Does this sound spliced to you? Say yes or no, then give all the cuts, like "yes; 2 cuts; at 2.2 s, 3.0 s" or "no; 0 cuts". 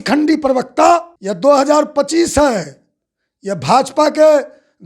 yes; 1 cut; at 1.2 s